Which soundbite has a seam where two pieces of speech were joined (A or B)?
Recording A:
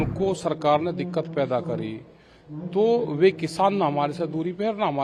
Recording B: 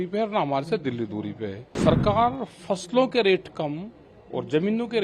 B